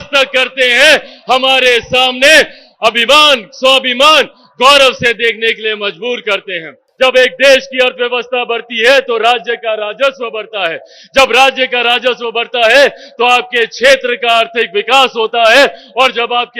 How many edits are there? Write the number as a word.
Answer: one